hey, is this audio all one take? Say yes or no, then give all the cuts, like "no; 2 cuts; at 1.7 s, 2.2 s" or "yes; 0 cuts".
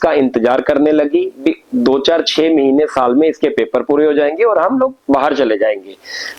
yes; 0 cuts